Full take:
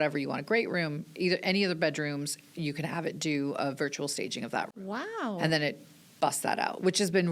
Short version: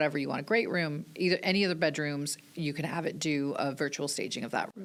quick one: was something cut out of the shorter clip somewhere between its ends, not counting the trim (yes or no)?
no